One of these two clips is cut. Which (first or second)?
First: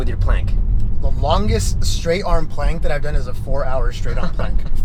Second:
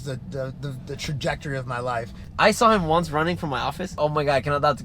second